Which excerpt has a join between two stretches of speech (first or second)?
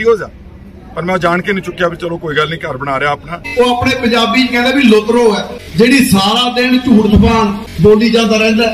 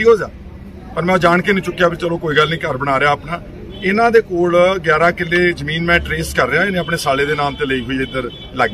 first